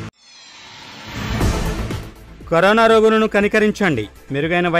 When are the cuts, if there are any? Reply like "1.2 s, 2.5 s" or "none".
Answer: 1.3 s